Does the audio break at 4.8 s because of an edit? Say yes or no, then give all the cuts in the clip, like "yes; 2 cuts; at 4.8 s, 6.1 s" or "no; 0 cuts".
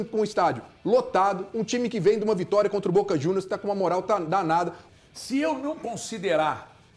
yes; 1 cut; at 4.8 s